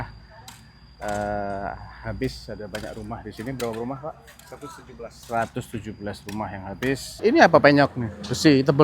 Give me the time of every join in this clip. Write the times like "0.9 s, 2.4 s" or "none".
7.2 s

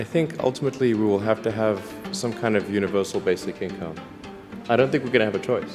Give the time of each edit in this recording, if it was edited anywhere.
none

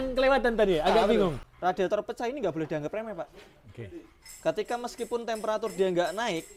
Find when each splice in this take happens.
1.5 s

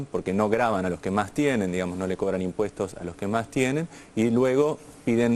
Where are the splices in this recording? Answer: none

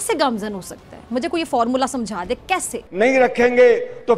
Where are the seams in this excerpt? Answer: 2.8 s

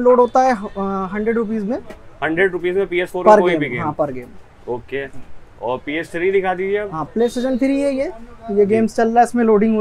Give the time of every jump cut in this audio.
none

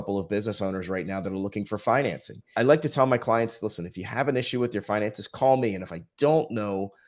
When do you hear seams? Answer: 2.5 s

